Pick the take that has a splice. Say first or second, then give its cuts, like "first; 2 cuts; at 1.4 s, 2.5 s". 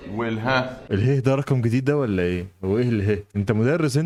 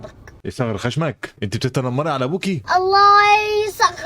second; 1 cut; at 2.6 s